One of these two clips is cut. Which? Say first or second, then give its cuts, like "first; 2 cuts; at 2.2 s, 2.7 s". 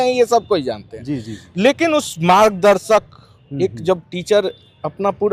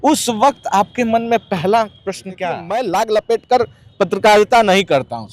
second; 1 cut; at 2.6 s